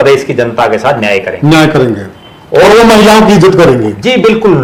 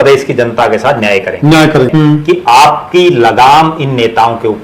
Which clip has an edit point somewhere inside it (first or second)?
second